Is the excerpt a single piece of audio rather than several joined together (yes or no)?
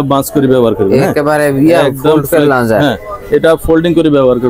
yes